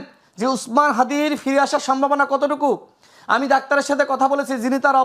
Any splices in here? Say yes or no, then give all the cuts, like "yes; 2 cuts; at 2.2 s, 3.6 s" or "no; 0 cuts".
no; 0 cuts